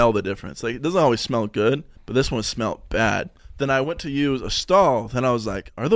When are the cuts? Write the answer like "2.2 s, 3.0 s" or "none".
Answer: 1.9 s, 3.4 s